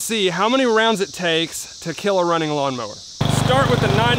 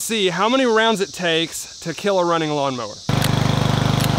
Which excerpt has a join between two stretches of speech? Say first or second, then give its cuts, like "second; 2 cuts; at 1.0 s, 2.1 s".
second; 1 cut; at 3.1 s